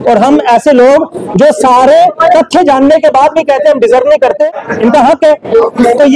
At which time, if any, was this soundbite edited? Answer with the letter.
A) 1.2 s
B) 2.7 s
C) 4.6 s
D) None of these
C